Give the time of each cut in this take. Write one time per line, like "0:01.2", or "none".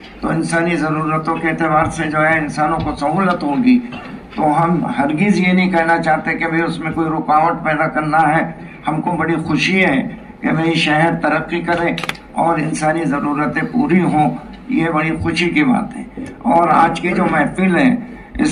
none